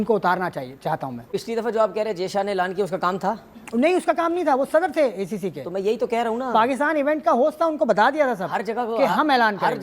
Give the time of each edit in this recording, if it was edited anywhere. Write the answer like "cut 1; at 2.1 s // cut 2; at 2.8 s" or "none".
cut 1; at 1.3 s

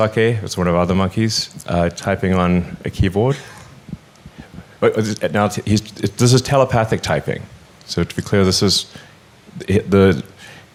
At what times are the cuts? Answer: none

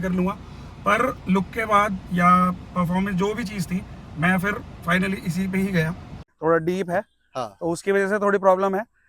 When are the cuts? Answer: cut 1; at 6.3 s

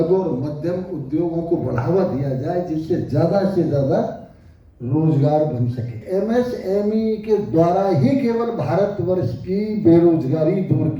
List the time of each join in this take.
cut 1; at 6.0 s

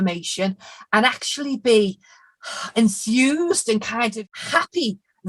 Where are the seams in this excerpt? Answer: cut 1; at 4.1 s

